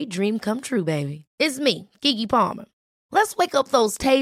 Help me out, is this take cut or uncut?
uncut